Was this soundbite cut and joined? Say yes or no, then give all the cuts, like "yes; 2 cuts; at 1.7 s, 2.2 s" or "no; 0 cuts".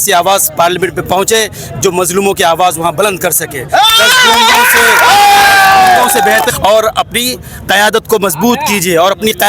yes; 1 cut; at 6.5 s